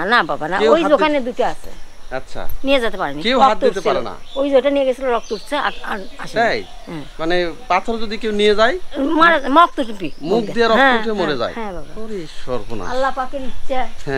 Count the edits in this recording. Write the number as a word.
zero